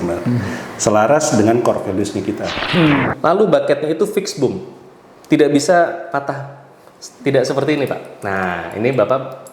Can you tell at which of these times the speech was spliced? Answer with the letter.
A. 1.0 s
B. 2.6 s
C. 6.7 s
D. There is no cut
B